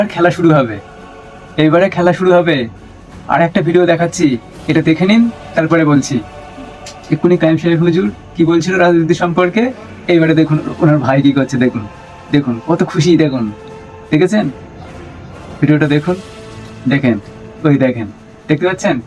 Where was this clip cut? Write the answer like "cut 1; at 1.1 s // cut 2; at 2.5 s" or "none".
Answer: none